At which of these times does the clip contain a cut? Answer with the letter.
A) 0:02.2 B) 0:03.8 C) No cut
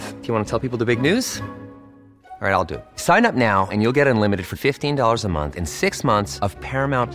C